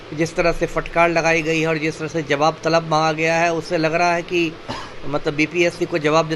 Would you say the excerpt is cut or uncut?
uncut